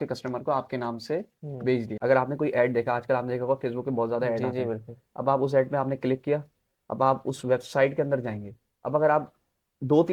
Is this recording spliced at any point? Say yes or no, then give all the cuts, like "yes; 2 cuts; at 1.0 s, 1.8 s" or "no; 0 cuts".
yes; 1 cut; at 1.9 s